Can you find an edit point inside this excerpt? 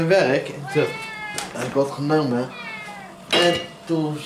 no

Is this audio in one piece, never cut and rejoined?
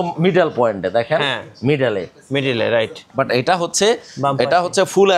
yes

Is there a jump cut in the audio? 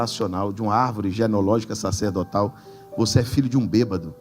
no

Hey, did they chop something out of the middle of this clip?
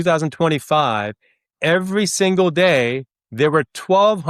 no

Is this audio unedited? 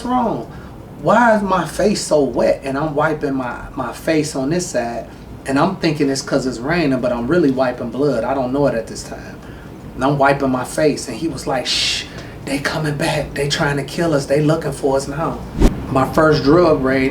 no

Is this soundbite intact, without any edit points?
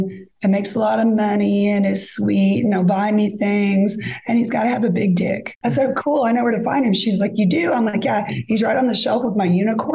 no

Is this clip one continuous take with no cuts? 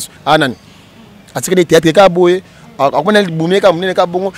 yes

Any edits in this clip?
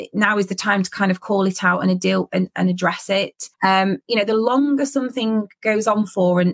yes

